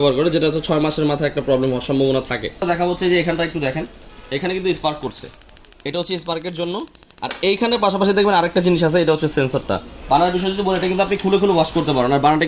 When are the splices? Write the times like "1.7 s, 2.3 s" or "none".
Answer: 2.6 s, 9.9 s

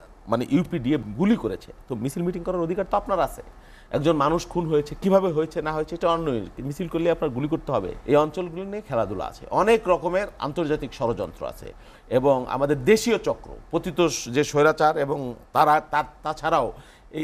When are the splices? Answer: 1.1 s, 7.9 s

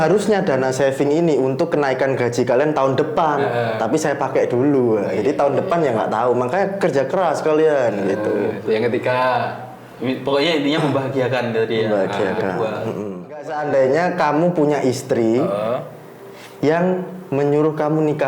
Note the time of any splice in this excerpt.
13.5 s

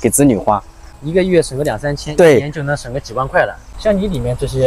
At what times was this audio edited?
none

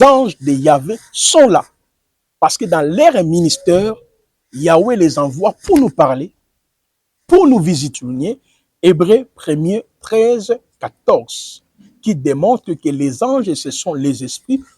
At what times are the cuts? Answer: 7.9 s

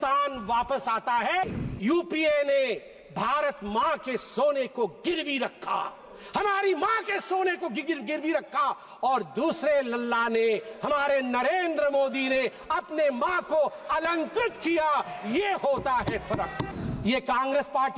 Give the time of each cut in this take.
1.5 s, 16.7 s

